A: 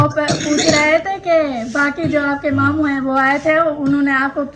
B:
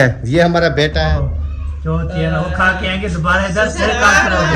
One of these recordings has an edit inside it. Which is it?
B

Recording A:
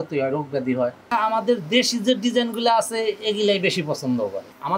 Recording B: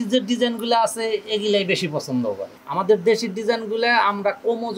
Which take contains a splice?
A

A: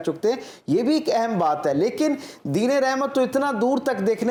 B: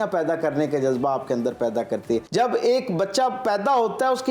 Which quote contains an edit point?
B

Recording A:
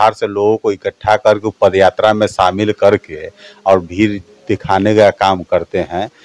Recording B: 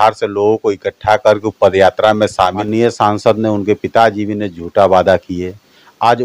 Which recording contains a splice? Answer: B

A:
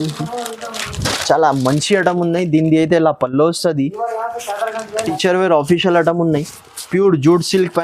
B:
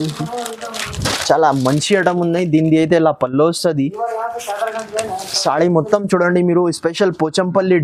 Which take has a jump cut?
A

